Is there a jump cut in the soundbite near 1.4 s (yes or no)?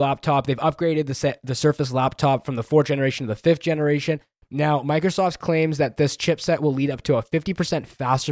no